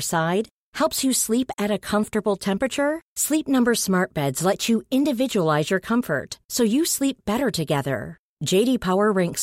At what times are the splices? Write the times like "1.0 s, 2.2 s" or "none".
none